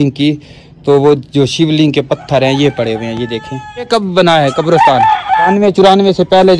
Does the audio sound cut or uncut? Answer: cut